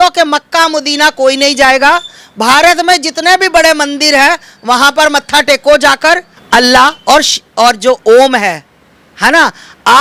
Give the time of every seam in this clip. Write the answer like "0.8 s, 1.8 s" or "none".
6.3 s